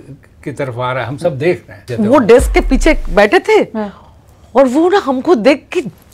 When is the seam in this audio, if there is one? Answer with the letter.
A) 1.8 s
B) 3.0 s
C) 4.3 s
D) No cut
A